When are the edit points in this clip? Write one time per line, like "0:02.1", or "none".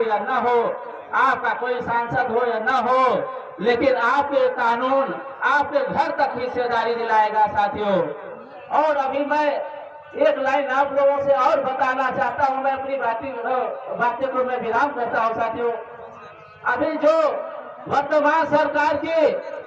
none